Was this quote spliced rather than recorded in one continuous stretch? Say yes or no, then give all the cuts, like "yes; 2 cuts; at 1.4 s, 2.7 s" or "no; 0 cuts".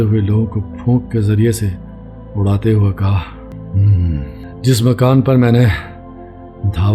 yes; 2 cuts; at 3.5 s, 4.4 s